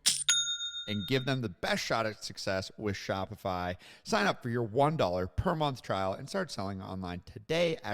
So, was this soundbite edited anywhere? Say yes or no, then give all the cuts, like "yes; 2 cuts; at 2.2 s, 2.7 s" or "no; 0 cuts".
no; 0 cuts